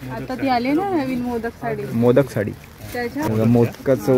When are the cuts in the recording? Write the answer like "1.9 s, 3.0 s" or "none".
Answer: 3.3 s